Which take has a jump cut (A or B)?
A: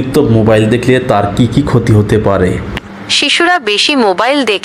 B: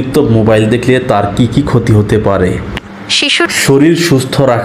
B